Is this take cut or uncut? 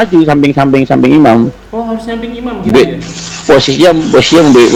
uncut